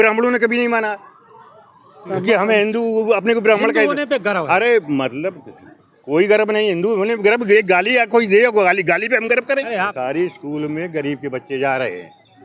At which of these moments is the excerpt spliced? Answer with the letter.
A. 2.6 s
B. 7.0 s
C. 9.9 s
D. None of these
C